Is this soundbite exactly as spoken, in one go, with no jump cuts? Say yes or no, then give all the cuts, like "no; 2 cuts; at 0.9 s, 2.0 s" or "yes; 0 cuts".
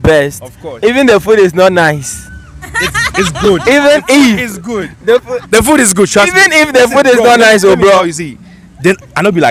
yes; 0 cuts